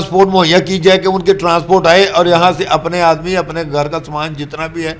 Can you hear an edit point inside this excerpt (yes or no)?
no